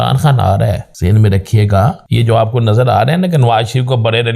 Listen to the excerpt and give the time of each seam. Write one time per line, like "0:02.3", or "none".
0:00.9
0:02.0